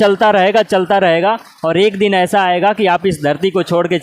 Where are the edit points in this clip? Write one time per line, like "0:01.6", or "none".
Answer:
none